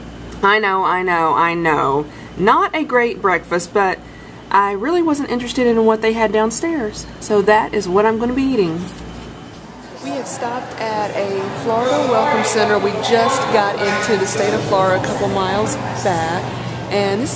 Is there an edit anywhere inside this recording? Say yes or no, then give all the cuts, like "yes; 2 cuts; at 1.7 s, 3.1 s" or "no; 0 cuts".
yes; 1 cut; at 2.2 s